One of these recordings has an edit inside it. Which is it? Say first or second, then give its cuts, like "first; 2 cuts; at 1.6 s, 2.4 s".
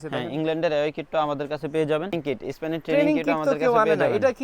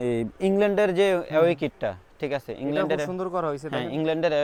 first; 1 cut; at 2.2 s